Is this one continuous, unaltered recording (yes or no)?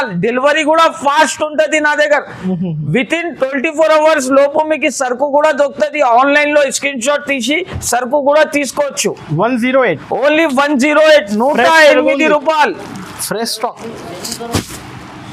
yes